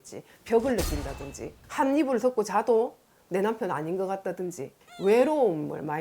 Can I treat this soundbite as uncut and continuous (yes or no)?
no